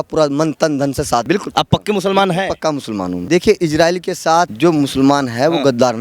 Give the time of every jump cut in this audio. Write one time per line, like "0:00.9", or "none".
0:01.2
0:03.1
0:04.5